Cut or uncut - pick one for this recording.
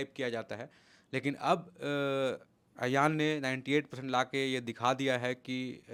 uncut